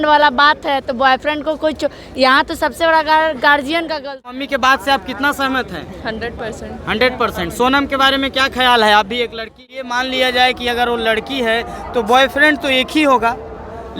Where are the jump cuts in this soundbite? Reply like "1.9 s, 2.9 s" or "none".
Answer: 4.3 s, 9.9 s